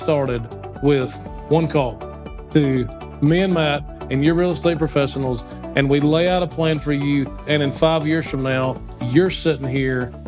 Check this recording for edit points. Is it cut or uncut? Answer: cut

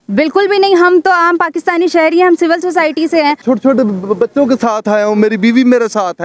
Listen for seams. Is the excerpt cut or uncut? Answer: cut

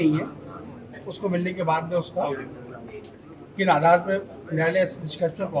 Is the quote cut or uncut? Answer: uncut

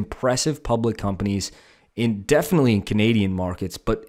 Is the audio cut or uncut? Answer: uncut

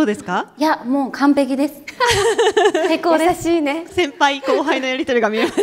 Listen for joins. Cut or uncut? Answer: cut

